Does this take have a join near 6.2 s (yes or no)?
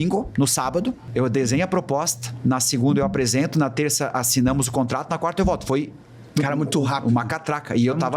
no